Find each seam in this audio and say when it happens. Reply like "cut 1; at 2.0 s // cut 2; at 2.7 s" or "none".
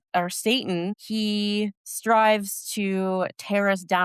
cut 1; at 1.0 s // cut 2; at 1.9 s